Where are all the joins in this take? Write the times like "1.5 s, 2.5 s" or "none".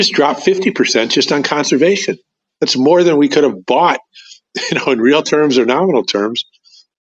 none

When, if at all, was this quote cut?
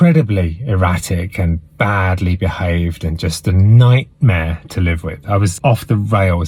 5.5 s

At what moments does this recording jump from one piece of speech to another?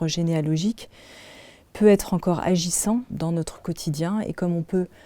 3.1 s

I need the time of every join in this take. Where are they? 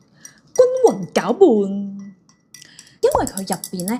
none

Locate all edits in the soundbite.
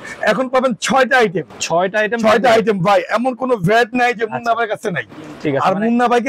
none

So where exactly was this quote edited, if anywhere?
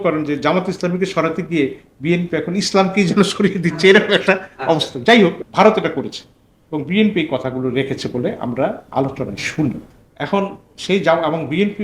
5.4 s, 9.9 s

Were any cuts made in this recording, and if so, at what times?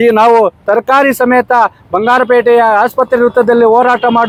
none

